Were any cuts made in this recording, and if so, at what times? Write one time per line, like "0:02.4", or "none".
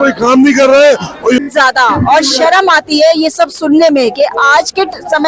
0:01.4